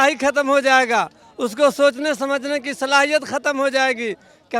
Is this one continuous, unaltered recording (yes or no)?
yes